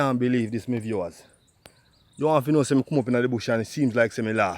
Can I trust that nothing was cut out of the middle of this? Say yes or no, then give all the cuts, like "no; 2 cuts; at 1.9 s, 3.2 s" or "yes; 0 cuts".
yes; 0 cuts